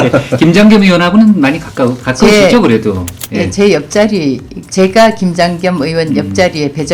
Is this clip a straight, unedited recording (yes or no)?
no